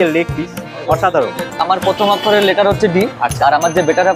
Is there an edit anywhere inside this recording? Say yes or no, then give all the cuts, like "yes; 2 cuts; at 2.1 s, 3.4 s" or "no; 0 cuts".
yes; 1 cut; at 1.6 s